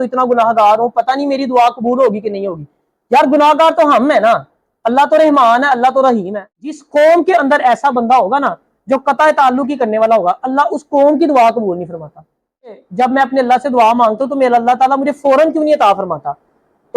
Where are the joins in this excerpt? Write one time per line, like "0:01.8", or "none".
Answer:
0:06.8
0:12.8